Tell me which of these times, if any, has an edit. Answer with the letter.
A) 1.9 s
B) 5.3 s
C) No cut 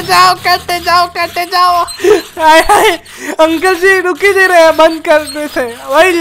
C